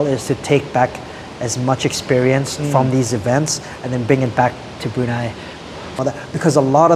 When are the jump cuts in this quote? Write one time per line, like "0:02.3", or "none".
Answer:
0:05.9